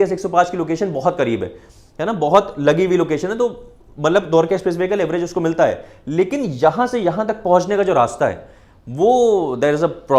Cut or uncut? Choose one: uncut